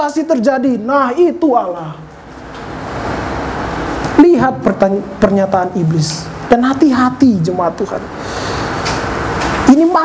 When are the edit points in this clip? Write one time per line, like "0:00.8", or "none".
none